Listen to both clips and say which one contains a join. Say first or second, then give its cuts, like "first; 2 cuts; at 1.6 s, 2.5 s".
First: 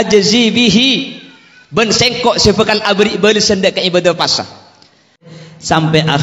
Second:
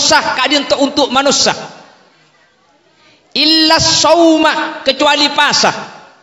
first; 1 cut; at 5.2 s